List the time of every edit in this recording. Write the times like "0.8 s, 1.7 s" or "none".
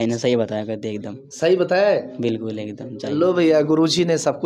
none